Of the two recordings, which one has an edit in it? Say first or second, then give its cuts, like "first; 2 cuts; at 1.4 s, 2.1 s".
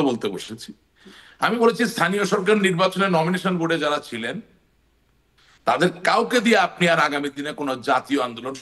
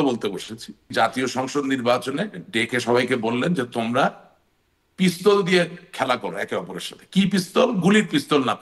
second; 1 cut; at 0.9 s